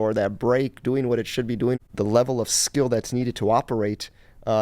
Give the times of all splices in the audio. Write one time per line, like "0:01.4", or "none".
0:01.8